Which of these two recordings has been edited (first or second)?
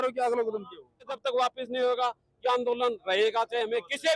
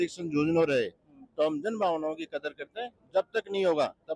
first